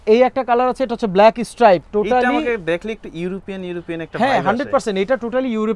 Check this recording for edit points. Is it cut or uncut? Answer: uncut